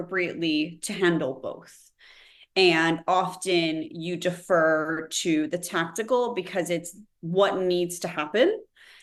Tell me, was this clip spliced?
no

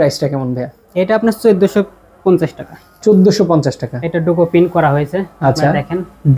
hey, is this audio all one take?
yes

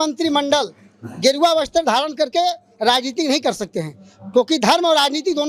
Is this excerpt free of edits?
yes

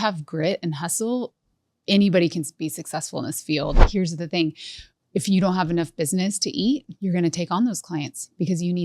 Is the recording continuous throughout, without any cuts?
no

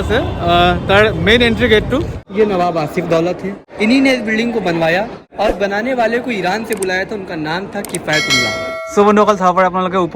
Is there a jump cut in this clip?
yes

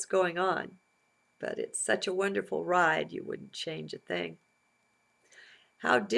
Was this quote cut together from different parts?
no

